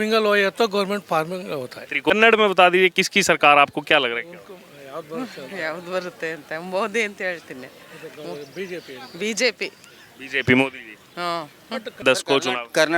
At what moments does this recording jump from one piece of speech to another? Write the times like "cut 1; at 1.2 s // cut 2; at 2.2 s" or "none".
cut 1; at 2.1 s // cut 2; at 12.0 s